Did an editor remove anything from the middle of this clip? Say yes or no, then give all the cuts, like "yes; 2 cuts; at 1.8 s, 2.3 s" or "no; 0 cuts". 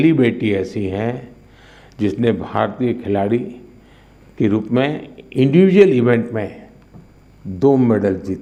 no; 0 cuts